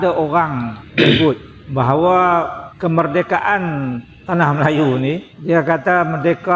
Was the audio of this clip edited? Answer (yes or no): no